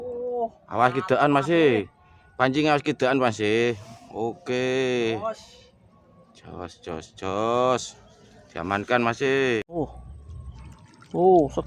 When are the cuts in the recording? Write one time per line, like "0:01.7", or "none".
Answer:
0:09.8